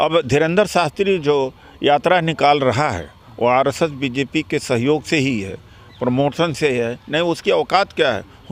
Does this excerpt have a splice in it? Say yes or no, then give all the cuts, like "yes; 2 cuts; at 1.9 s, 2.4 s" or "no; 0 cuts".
no; 0 cuts